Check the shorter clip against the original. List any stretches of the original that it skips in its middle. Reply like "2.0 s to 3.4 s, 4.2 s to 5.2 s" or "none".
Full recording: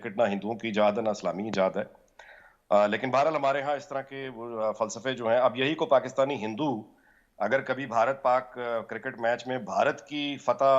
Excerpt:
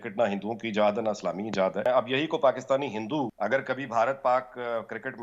1.9 s to 5.3 s, 6.8 s to 7.3 s